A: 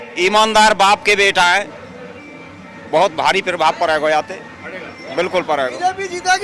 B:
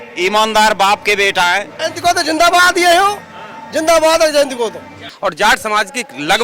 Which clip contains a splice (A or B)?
B